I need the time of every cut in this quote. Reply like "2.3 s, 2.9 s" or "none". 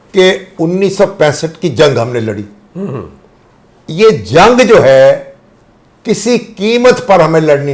none

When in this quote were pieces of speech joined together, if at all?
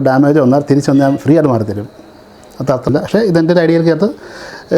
2.9 s

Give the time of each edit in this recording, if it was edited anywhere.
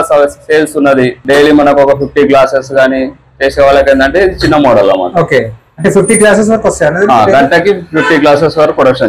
1.2 s

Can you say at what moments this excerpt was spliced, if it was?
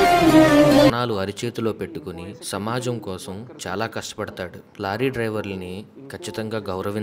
0.9 s

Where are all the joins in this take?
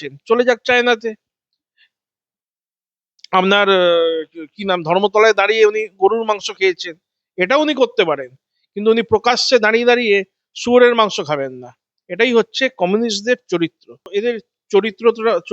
14.1 s

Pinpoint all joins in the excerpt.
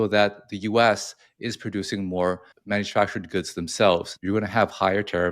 2.5 s, 4.1 s

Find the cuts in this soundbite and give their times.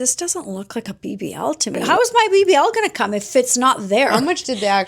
1.8 s, 4.2 s

